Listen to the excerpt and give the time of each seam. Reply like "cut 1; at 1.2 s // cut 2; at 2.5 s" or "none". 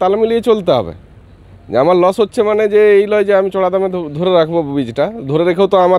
none